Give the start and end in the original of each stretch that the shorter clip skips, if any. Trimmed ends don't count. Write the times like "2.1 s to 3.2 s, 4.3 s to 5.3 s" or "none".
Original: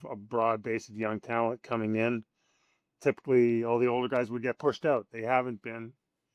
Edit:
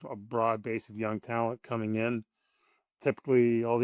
none